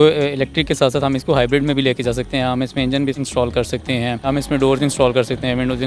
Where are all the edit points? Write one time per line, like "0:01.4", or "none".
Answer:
0:03.2
0:04.3